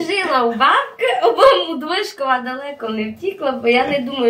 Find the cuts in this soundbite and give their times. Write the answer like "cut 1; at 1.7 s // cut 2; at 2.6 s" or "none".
none